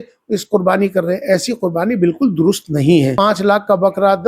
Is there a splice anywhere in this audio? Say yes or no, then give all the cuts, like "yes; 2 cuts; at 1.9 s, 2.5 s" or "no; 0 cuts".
yes; 1 cut; at 3.1 s